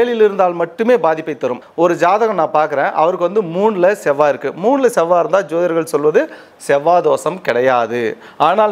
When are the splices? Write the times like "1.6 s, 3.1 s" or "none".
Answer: 1.7 s